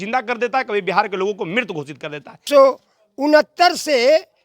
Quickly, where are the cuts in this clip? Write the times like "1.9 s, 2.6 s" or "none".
2.4 s